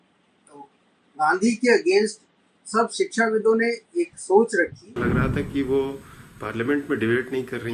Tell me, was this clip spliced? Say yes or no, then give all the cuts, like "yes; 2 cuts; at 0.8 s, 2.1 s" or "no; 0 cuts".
yes; 1 cut; at 4.9 s